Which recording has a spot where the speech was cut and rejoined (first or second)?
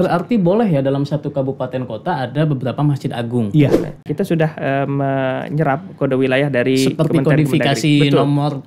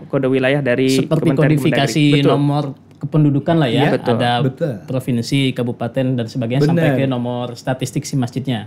first